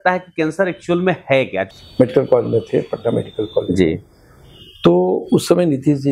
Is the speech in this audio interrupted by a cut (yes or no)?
yes